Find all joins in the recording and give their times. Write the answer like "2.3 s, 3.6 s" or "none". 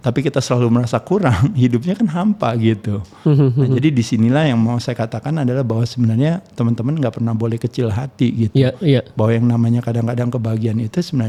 none